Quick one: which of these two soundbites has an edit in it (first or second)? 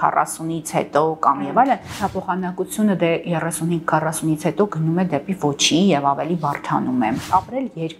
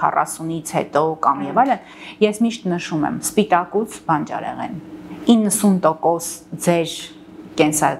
first